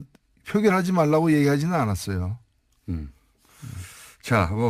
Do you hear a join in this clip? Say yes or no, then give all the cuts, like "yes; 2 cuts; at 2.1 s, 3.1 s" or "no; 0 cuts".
yes; 1 cut; at 3.3 s